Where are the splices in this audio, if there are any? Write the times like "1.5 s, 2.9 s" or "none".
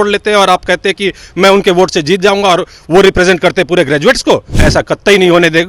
4.6 s